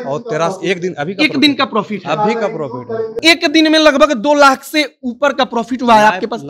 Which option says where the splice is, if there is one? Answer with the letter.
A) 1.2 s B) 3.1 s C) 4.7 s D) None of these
B